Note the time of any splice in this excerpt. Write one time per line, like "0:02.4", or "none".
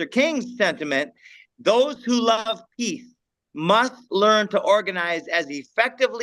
none